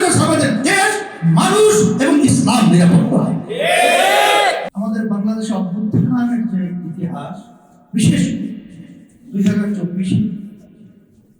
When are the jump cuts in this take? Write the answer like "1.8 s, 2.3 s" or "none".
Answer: 4.6 s